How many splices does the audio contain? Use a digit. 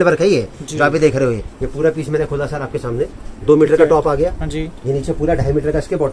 1